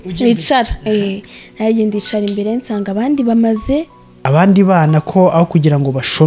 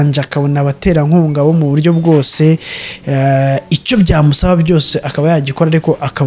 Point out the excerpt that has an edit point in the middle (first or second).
first